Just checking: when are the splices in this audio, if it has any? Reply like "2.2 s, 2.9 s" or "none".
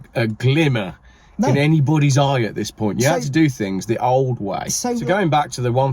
5.0 s